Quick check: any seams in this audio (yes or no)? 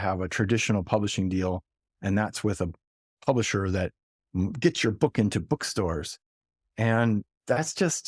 no